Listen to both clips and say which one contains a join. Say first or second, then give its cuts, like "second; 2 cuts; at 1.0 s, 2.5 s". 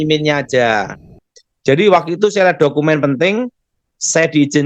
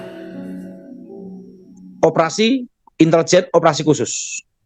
first; 1 cut; at 1.0 s